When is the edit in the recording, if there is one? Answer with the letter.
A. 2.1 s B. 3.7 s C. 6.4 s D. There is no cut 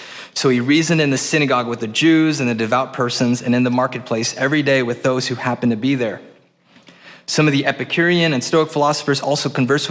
D